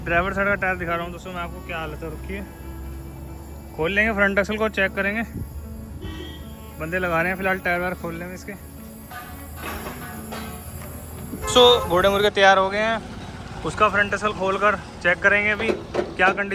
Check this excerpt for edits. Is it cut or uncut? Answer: uncut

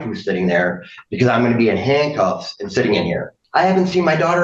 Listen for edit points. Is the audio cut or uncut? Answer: cut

